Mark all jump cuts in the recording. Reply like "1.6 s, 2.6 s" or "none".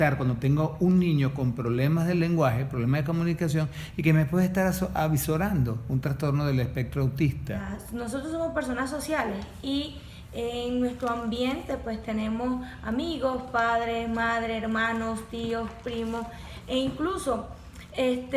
7.7 s